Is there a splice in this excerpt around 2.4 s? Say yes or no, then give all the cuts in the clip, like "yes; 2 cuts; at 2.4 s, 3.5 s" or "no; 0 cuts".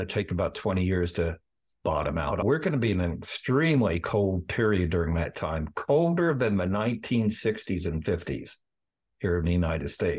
yes; 1 cut; at 2.4 s